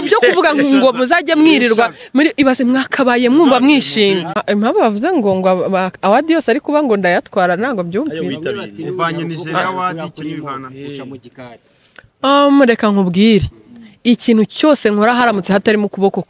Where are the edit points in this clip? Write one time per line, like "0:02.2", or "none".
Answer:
0:04.3

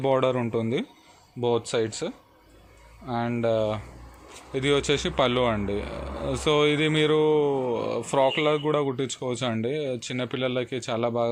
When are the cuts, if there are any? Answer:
none

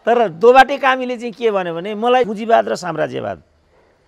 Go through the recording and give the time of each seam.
0:02.3

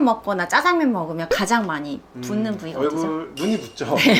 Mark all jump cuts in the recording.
none

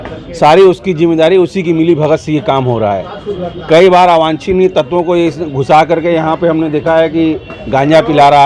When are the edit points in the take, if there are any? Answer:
none

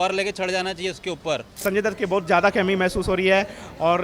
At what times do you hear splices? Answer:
0:01.6

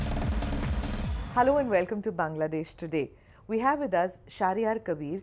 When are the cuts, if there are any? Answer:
0:01.2

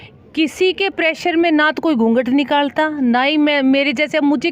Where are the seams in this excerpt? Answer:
none

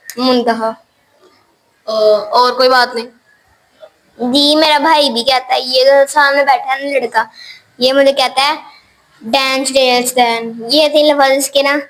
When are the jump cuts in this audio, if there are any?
none

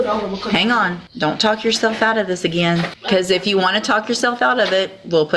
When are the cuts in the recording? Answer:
0:01.0
0:03.0

